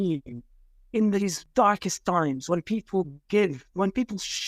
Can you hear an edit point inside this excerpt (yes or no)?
yes